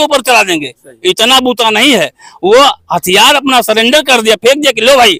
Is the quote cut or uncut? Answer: uncut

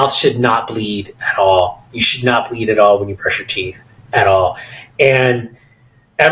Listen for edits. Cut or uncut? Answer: uncut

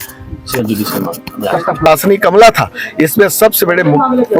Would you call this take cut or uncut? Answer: cut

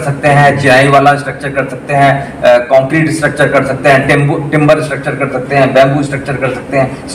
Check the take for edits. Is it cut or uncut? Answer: uncut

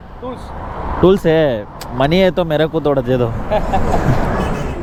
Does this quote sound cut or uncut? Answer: uncut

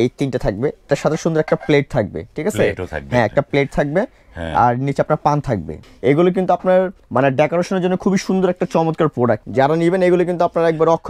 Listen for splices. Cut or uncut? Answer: cut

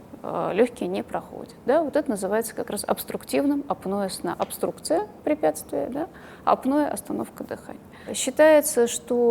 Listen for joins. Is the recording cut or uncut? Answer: uncut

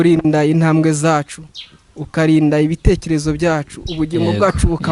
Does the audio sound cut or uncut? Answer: uncut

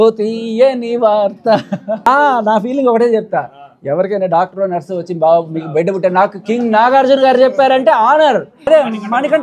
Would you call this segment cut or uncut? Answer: cut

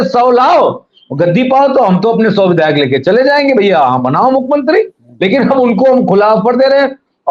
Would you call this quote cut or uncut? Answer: uncut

